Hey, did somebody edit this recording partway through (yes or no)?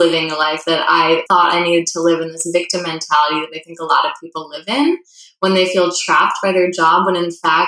yes